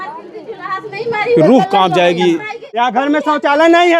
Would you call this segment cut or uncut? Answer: cut